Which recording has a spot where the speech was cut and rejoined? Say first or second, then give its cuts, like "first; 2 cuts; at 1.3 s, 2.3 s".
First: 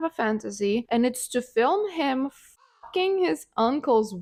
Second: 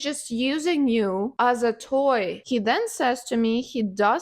second; 1 cut; at 2.4 s